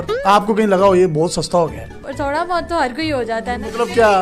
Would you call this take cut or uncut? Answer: cut